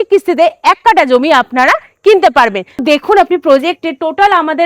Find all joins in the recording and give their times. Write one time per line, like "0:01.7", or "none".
0:02.8